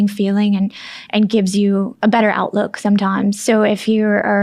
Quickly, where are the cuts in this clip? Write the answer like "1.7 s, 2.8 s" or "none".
1.9 s, 3.4 s